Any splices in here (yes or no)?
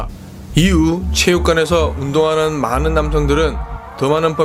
no